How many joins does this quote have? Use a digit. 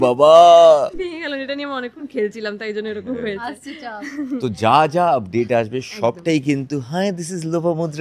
0